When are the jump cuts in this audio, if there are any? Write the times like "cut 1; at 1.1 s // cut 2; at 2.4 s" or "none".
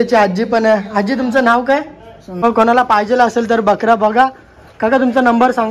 cut 1; at 2.4 s